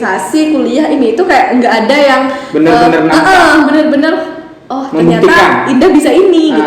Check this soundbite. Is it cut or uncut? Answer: uncut